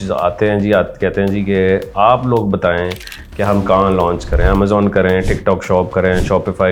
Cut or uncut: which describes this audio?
uncut